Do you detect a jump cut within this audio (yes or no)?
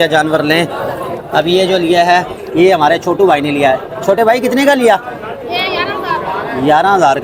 no